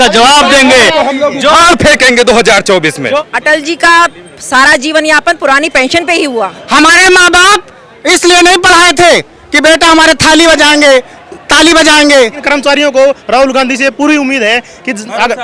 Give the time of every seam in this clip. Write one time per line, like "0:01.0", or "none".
0:03.2
0:06.6
0:12.4